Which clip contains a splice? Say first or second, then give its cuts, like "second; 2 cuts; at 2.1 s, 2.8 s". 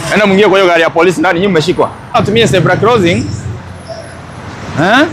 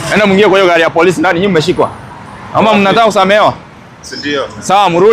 first; 1 cut; at 2.2 s